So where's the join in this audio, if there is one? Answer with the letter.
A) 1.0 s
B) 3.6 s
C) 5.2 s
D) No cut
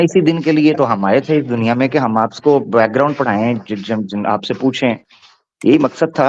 D